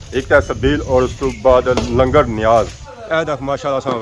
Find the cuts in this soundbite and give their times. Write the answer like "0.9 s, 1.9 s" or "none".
2.7 s